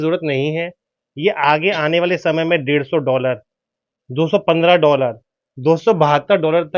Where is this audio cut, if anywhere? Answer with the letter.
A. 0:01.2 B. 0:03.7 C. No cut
C